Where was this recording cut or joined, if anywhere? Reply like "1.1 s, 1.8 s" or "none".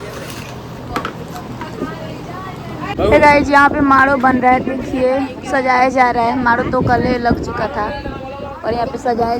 2.9 s